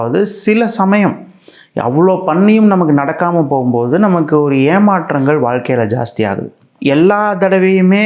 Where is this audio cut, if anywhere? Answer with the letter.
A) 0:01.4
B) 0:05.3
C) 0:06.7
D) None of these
C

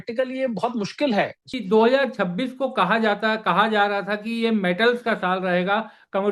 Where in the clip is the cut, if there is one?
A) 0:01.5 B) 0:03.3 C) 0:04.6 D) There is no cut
A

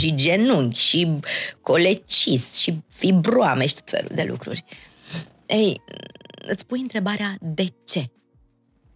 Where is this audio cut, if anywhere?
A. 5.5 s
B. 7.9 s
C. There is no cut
C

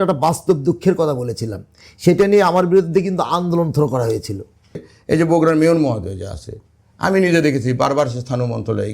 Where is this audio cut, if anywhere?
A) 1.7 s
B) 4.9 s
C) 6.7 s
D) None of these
B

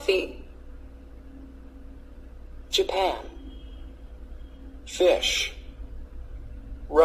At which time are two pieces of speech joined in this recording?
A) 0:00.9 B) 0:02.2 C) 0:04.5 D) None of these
D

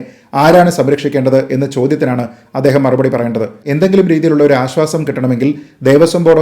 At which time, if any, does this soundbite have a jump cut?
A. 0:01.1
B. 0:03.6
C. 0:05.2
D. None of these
B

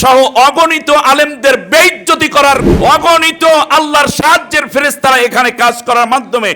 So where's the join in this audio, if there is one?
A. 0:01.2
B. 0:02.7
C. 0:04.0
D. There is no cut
B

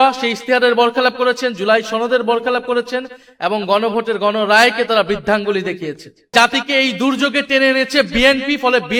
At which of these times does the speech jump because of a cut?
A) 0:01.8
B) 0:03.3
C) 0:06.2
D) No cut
C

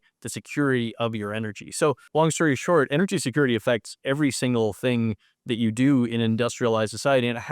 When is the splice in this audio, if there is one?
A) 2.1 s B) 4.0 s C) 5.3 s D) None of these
A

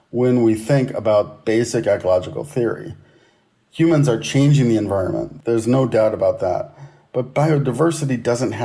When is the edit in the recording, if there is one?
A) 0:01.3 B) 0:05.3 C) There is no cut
B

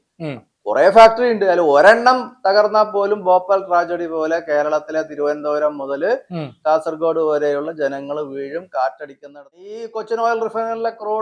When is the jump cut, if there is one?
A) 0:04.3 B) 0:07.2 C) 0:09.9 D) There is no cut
C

